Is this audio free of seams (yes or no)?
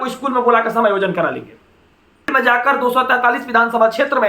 no